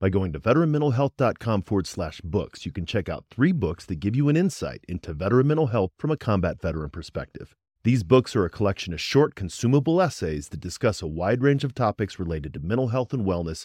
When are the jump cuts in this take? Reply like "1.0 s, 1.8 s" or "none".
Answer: none

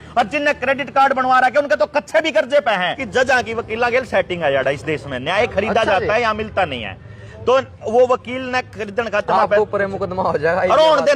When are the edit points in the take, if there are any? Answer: 3.0 s

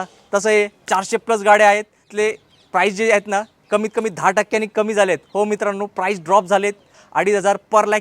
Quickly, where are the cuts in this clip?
2.0 s, 6.9 s

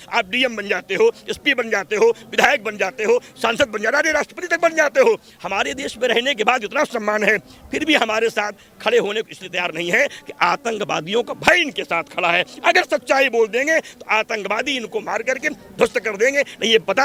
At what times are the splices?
none

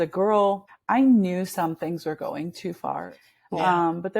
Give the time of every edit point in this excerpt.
3.1 s

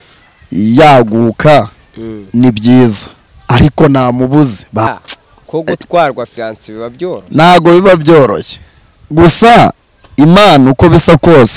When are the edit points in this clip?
4.9 s

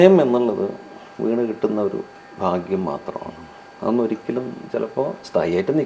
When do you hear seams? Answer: none

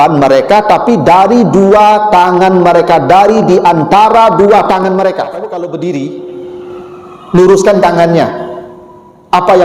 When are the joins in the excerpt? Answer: 5.4 s

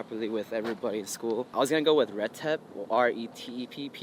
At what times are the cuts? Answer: 1.5 s

